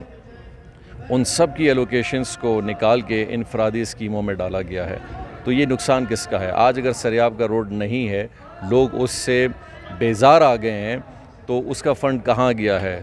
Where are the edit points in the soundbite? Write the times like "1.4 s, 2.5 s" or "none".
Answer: none